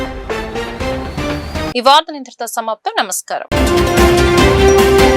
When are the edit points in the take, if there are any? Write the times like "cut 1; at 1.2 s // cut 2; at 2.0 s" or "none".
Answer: none